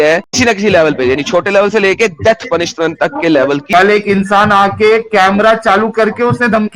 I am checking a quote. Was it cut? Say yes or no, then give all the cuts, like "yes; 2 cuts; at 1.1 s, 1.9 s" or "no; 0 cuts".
yes; 1 cut; at 3.7 s